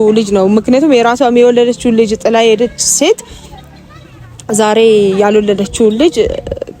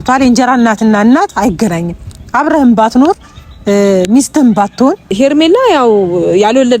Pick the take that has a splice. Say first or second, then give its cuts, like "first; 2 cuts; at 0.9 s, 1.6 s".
second; 1 cut; at 5.1 s